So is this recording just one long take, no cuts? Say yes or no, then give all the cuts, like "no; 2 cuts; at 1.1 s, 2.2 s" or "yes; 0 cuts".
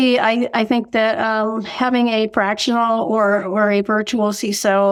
yes; 0 cuts